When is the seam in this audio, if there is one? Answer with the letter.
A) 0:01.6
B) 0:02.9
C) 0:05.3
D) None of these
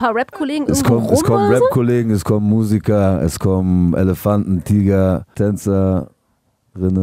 C